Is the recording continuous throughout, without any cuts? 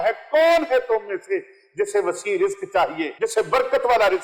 no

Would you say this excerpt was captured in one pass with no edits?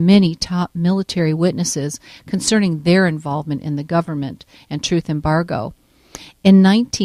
yes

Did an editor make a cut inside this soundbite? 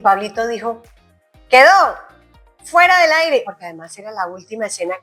yes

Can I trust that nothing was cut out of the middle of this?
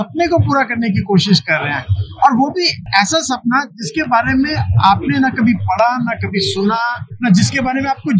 no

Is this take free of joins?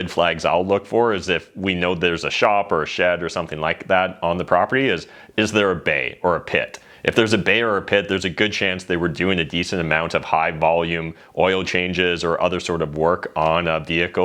yes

